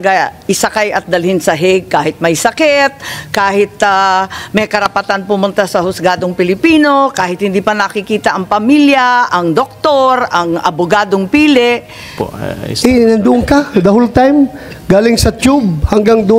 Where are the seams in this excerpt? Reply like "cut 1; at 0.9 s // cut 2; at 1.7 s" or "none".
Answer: cut 1; at 12.3 s